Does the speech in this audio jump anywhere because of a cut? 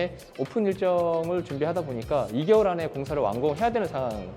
no; 0 cuts

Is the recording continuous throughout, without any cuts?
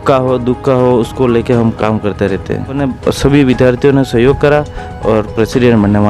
no; 1 cut; at 2.9 s

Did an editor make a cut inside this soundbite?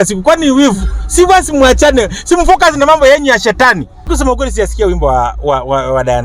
yes; 1 cut; at 4.0 s

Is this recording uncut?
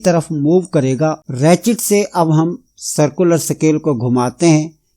no; 1 cut; at 1.2 s

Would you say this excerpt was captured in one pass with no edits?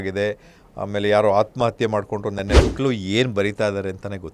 no; 1 cut; at 2.6 s

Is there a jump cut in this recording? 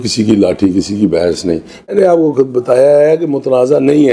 yes; 1 cut; at 1.9 s

